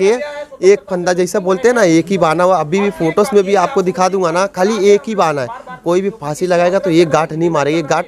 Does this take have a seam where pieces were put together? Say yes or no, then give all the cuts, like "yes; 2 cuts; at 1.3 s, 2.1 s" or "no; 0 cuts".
no; 0 cuts